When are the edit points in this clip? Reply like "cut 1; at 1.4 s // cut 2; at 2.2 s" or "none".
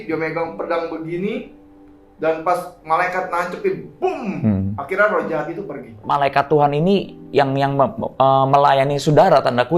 cut 1; at 6.0 s